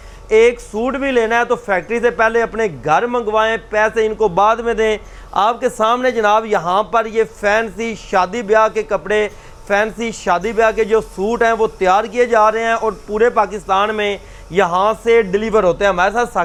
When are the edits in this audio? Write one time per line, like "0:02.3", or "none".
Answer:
none